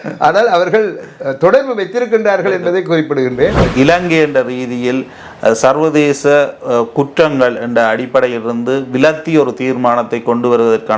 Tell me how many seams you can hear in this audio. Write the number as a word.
one